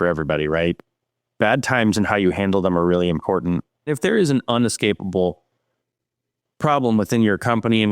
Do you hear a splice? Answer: yes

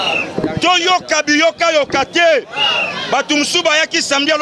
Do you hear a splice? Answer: no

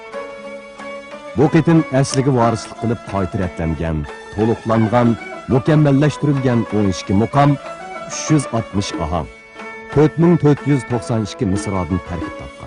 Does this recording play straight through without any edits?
no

